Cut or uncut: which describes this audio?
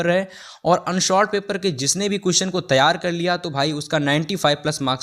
uncut